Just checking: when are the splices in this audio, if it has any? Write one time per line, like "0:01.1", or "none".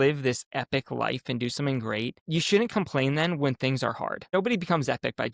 0:02.2
0:04.3